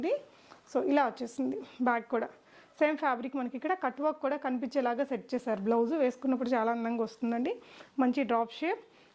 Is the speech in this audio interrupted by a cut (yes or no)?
no